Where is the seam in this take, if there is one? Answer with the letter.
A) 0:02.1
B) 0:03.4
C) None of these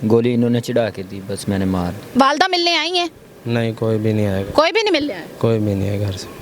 A